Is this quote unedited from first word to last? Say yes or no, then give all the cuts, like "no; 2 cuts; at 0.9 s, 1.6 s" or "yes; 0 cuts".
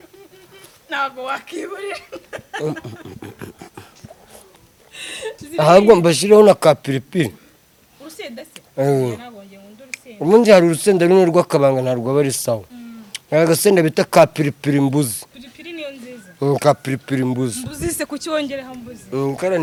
yes; 0 cuts